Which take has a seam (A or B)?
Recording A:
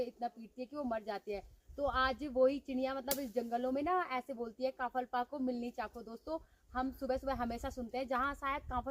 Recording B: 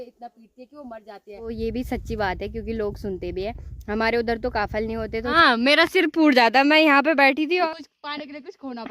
B